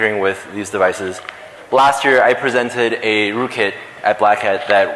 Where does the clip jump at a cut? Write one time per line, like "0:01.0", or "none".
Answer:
0:03.2